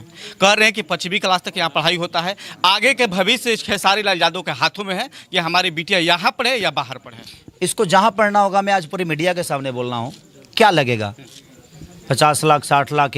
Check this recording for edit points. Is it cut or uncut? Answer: uncut